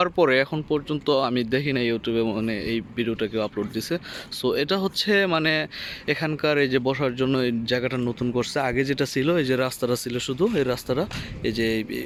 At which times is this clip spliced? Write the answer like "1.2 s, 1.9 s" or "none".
none